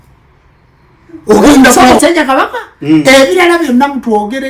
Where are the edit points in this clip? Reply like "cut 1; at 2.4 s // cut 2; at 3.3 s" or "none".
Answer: cut 1; at 2.0 s